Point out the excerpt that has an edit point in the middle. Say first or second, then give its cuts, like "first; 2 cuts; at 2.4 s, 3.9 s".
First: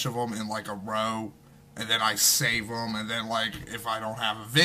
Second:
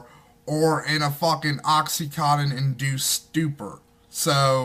second; 1 cut; at 2.6 s